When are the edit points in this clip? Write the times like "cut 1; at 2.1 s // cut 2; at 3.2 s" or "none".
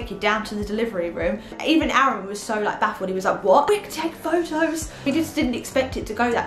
cut 1; at 1.5 s // cut 2; at 3.7 s // cut 3; at 5.1 s